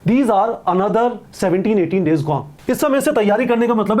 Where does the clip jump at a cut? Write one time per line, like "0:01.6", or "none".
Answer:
0:02.5